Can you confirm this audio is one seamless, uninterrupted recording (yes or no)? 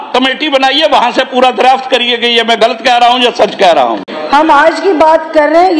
no